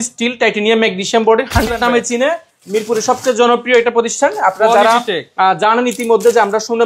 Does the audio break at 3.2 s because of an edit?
no; 1 cut; at 1.7 s

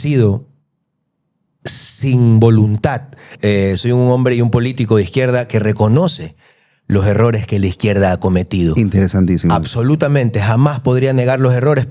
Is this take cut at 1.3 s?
no; 1 cut; at 3.3 s

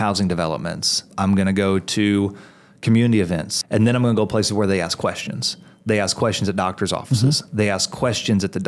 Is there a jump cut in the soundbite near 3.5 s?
yes; 2 cuts; at 1.1 s, 3.5 s

